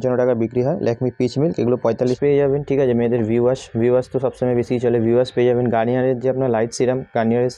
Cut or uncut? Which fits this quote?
cut